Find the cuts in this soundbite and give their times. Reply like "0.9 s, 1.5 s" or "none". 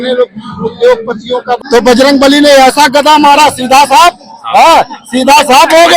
1.6 s

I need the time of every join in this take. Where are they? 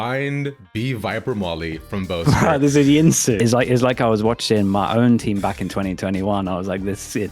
3.4 s

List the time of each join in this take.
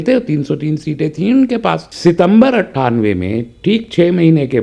1.9 s

